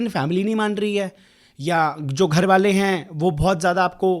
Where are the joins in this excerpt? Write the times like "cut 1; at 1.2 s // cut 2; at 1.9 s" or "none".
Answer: none